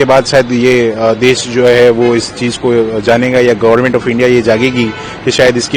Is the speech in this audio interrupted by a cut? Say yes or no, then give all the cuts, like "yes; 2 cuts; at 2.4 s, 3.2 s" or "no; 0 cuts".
no; 0 cuts